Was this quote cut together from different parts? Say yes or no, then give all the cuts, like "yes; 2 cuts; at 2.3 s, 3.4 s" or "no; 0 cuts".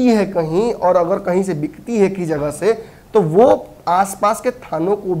no; 0 cuts